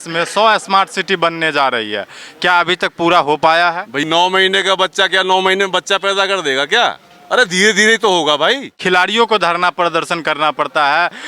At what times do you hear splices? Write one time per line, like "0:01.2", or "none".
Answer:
0:04.0
0:08.7

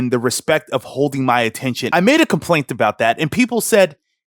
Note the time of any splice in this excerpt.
0:01.9

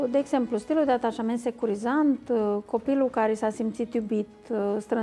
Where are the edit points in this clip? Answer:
none

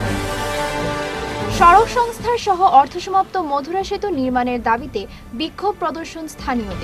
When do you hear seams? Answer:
none

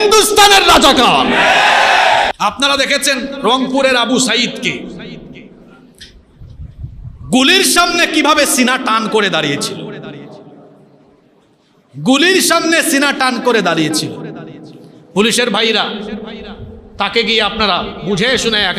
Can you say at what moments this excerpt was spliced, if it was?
0:02.3

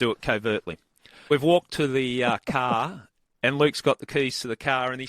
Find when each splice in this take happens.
0:01.3

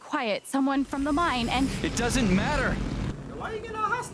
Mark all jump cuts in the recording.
0:03.1

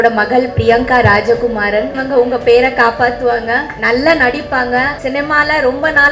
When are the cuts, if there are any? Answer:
0:02.0
0:03.7
0:05.0

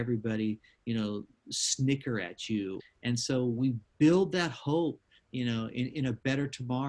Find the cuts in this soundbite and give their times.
0:02.8

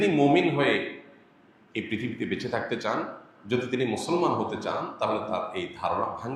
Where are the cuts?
none

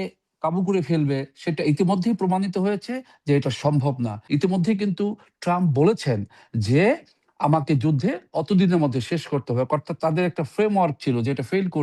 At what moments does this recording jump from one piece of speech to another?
0:04.2

